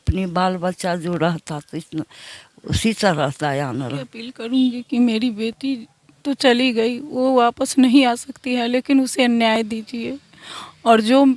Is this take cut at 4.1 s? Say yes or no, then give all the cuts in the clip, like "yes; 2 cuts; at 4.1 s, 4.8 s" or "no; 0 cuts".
yes; 1 cut; at 4.1 s